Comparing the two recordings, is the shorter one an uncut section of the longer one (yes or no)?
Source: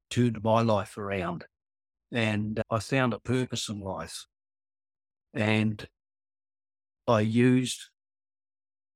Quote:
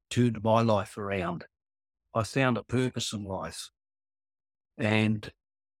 no